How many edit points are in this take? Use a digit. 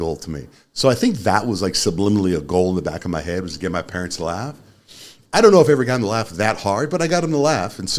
0